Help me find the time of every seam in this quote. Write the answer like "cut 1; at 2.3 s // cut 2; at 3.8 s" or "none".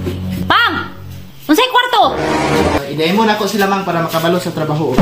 none